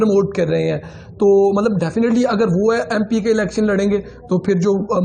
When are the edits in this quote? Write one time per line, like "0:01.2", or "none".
none